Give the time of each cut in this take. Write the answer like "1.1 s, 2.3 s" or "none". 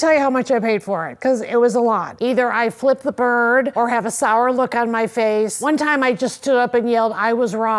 2.1 s, 3.7 s, 5.6 s